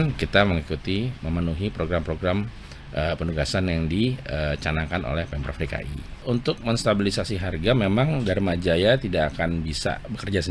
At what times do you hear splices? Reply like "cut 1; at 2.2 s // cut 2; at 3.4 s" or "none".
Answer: cut 1; at 6.2 s